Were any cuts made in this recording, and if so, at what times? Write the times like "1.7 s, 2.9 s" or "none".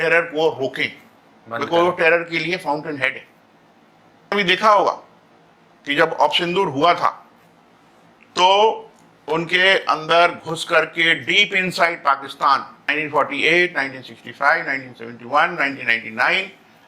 4.3 s, 12.8 s